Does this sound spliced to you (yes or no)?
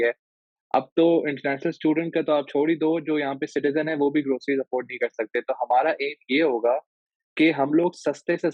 no